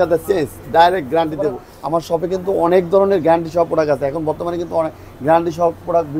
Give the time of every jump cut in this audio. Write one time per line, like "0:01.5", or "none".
0:01.6